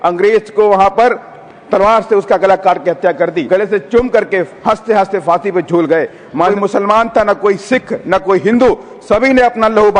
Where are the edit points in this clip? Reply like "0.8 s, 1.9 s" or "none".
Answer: 3.4 s, 6.5 s